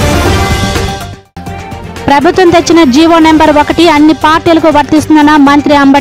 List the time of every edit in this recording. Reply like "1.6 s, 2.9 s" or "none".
1.1 s